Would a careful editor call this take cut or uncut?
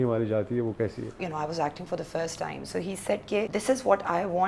cut